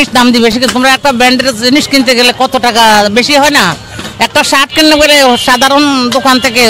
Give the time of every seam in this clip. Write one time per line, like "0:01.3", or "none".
none